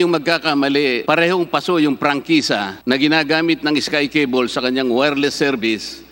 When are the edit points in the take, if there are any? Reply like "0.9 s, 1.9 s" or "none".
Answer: 1.0 s, 2.7 s